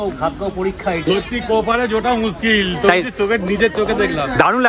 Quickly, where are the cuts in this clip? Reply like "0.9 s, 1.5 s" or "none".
1.0 s